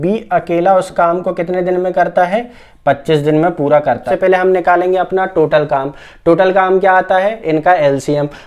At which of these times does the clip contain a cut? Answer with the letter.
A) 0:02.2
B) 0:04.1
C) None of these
B